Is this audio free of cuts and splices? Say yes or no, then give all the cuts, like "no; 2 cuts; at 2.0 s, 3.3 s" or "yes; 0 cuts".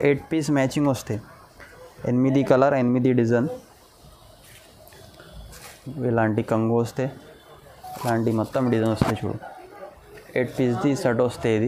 yes; 0 cuts